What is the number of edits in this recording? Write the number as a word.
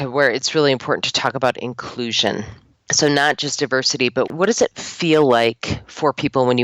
zero